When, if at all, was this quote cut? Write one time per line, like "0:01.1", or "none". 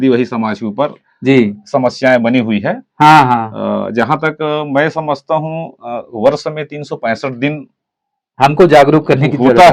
none